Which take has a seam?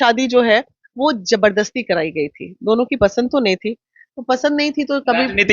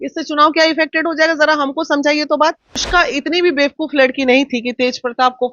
second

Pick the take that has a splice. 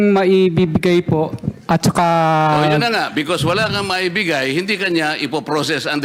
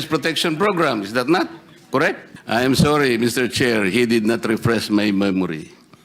second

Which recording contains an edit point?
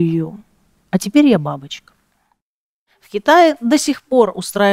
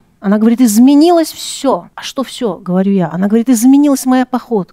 first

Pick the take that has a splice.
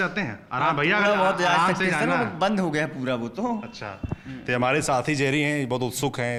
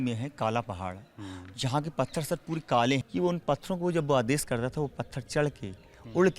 second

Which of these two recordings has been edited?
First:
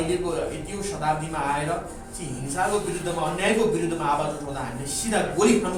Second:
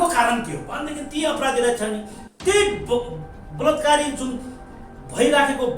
second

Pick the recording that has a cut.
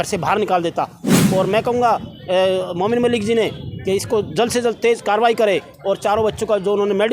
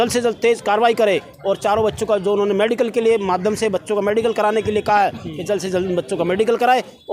first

